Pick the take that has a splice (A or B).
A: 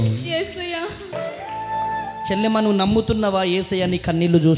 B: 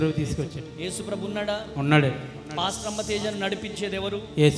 A